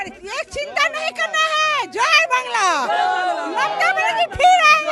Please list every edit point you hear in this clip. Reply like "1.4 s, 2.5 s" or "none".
none